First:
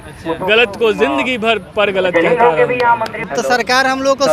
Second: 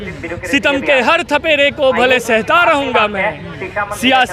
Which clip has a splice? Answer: first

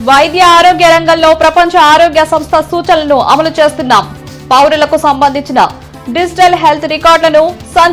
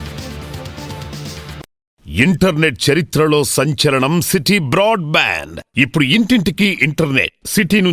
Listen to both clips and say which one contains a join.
second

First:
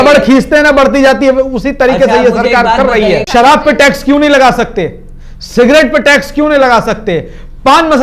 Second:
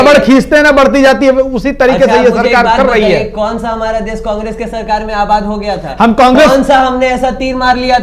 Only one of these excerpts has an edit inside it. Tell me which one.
first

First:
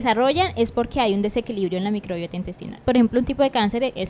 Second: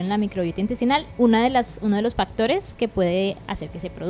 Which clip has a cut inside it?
first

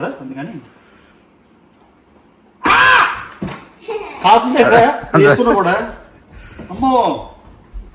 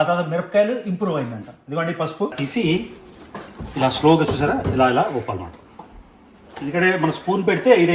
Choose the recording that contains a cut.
second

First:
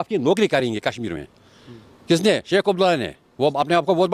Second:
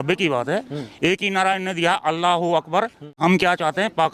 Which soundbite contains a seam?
second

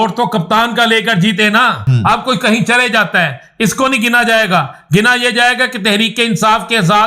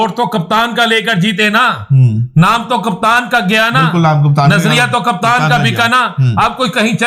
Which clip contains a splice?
first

